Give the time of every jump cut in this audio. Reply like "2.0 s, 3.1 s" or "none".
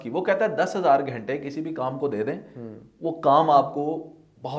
none